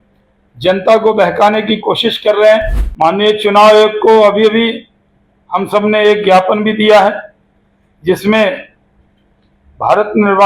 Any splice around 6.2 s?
no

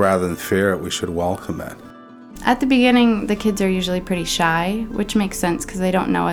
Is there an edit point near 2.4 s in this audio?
yes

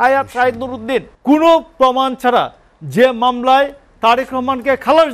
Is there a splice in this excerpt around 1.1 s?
yes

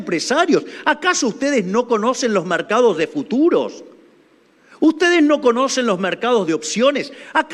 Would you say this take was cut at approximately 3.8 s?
no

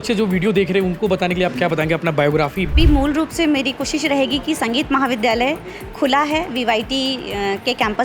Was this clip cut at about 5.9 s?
no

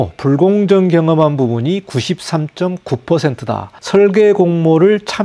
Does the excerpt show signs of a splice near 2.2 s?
no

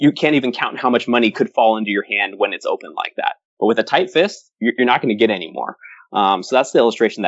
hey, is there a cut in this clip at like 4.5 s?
yes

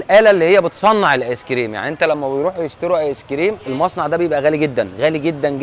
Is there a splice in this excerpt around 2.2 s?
no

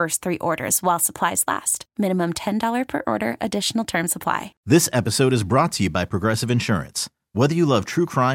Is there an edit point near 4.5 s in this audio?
yes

